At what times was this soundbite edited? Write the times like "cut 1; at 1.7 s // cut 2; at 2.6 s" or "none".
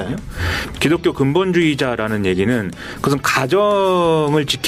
none